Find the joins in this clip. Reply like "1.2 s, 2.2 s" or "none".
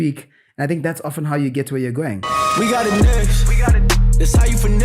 2.2 s